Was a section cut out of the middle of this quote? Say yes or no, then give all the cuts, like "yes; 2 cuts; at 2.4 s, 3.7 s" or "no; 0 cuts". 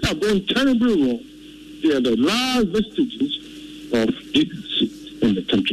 no; 0 cuts